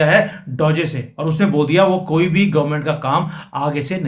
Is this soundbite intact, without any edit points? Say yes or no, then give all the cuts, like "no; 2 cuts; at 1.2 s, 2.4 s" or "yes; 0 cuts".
yes; 0 cuts